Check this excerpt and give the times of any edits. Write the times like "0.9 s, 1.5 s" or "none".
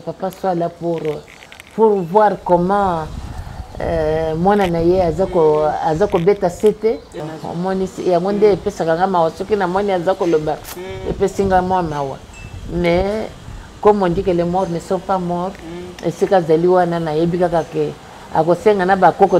7.3 s